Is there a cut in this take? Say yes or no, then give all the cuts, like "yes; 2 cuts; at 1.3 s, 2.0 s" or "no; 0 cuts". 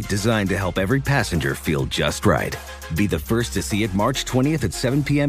no; 0 cuts